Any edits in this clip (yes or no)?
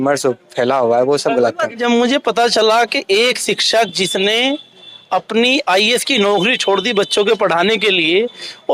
yes